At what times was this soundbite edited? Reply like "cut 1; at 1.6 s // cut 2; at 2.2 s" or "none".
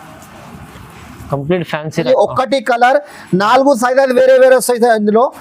cut 1; at 2.0 s